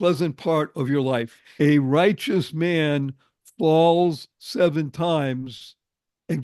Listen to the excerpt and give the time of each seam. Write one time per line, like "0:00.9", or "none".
0:01.4